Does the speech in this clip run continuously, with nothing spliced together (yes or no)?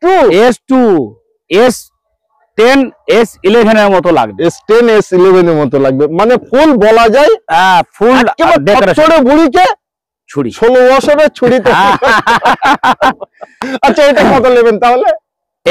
yes